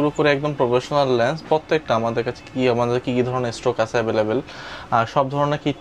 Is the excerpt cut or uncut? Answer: uncut